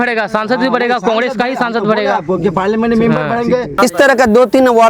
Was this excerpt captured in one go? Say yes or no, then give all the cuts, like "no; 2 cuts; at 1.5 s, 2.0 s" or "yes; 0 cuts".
no; 1 cut; at 3.7 s